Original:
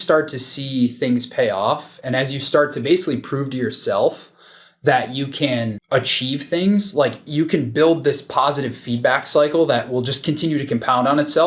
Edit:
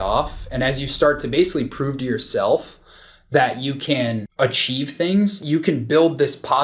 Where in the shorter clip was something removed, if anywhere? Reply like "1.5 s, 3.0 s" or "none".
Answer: 5.4 s